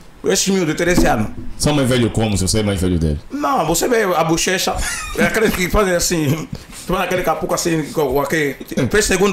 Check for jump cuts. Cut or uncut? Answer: uncut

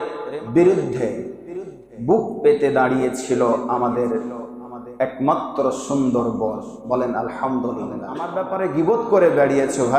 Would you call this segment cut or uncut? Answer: cut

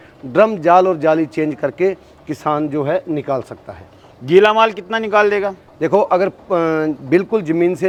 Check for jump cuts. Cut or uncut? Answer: uncut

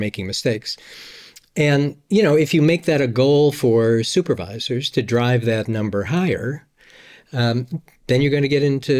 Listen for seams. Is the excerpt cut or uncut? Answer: uncut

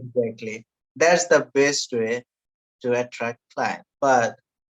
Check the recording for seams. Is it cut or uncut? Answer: cut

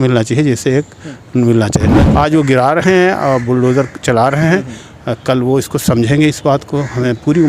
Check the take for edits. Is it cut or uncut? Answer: cut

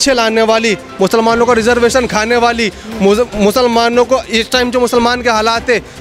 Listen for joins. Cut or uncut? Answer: uncut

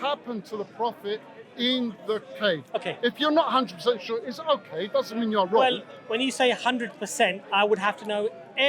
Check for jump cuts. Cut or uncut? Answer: uncut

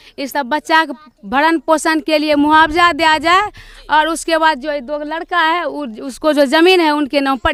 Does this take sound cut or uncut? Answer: uncut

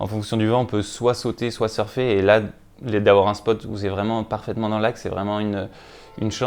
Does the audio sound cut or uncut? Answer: uncut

